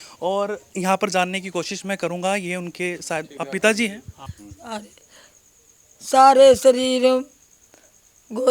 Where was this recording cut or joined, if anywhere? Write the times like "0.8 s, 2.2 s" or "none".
4.3 s